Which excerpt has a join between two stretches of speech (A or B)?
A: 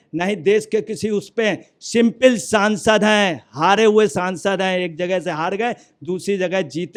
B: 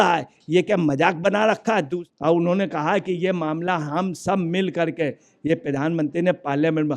B